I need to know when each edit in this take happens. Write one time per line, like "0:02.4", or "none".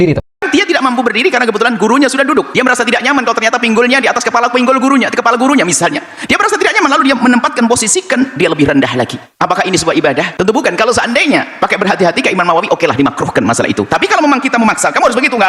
none